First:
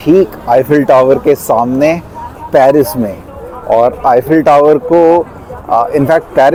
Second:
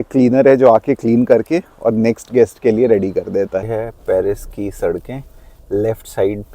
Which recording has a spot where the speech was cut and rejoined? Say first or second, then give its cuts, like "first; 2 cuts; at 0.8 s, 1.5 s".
second; 1 cut; at 3.7 s